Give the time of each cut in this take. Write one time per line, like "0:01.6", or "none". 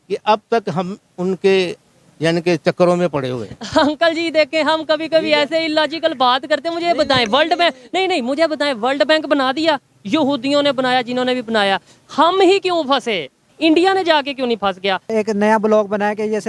0:13.5
0:15.1